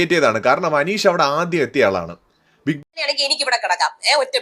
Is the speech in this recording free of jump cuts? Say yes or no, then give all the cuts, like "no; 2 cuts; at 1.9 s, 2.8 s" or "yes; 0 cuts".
no; 1 cut; at 2.8 s